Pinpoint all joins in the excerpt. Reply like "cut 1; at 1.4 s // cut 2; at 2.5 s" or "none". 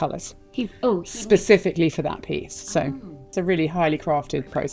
cut 1; at 3.3 s